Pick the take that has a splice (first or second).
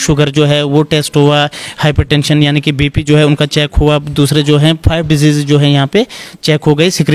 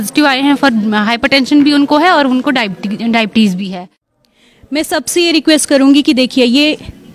second